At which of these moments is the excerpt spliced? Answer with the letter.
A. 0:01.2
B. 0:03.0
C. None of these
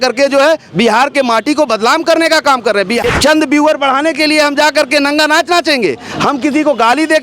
B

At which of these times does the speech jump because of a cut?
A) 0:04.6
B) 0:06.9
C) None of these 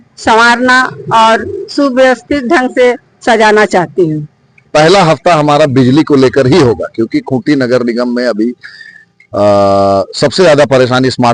A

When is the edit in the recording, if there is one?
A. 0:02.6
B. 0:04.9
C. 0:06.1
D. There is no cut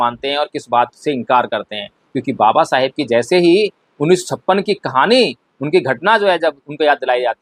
D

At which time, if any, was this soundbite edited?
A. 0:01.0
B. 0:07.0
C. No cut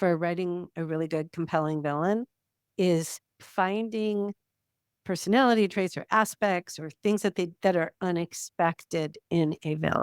C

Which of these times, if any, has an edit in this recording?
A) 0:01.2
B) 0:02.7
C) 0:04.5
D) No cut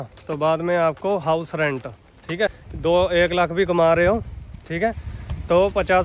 B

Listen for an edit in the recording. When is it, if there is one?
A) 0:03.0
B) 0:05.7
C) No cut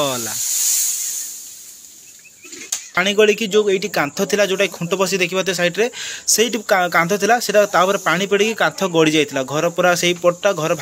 A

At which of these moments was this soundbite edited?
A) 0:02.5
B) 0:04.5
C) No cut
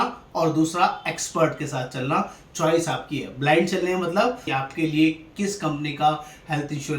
B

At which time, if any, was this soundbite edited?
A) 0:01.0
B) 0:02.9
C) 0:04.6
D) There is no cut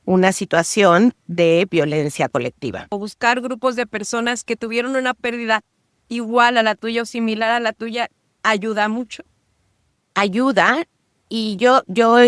B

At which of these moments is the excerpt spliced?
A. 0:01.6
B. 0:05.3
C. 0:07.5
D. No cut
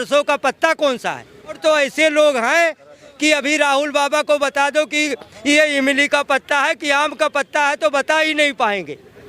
A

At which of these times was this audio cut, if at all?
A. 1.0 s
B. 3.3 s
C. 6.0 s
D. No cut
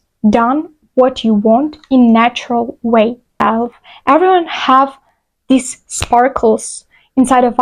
B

